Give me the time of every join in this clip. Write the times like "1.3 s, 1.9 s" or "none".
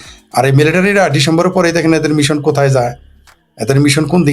none

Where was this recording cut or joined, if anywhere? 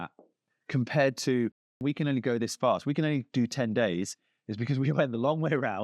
1.8 s

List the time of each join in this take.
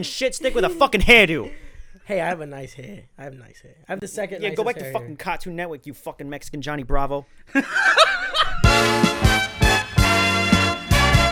8.5 s

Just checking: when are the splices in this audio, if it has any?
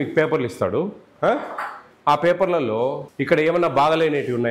3.1 s

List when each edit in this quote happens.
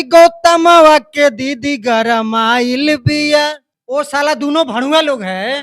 3.7 s

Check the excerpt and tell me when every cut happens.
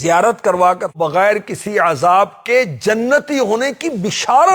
0.9 s

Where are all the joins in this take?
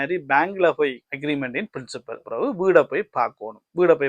1.1 s, 2.2 s

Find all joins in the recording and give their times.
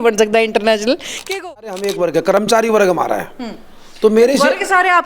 1.3 s

